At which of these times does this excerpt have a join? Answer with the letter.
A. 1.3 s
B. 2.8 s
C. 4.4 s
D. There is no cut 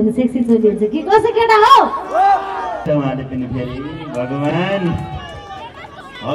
B